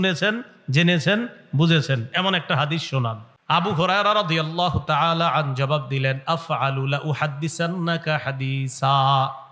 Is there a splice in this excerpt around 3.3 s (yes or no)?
yes